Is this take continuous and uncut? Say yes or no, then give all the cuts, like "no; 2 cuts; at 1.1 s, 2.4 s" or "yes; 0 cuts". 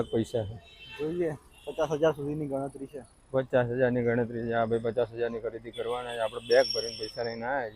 yes; 0 cuts